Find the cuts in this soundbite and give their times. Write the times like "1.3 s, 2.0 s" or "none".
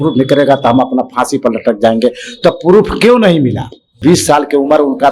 4.0 s